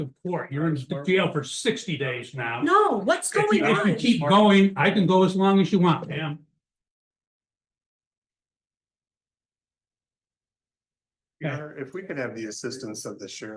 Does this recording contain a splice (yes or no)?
no